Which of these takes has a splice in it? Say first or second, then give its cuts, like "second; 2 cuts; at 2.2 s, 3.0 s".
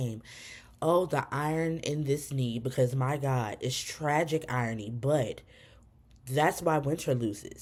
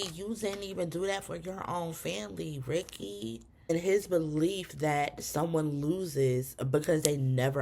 second; 1 cut; at 3.7 s